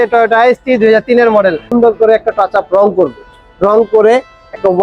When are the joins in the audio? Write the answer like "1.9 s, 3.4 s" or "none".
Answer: 1.6 s